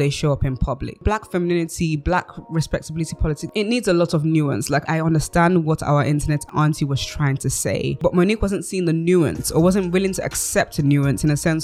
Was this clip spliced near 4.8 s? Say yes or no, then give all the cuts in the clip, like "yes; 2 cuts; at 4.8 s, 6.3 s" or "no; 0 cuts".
yes; 5 cuts; at 1.0 s, 3.4 s, 4.8 s, 6.5 s, 8.0 s